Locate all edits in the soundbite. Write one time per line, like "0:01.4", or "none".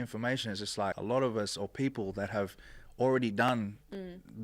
0:01.0